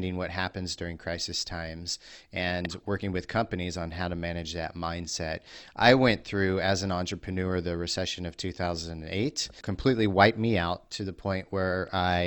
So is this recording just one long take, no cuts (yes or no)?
no